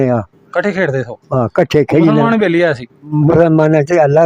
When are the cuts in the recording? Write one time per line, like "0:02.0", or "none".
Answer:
0:03.1